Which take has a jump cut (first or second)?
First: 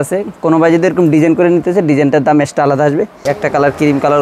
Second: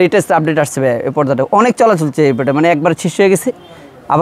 first